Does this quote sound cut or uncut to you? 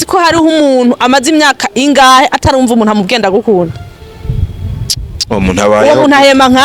uncut